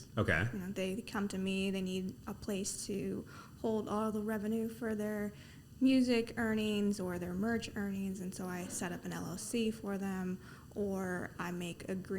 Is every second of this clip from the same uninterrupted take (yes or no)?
no